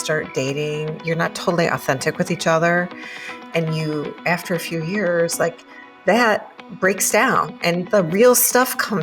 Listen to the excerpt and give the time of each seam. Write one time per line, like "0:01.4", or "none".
0:01.0